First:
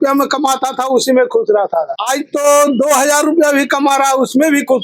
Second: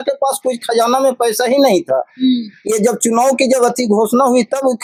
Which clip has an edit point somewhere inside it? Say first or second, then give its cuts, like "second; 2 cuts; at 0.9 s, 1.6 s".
first; 1 cut; at 2.0 s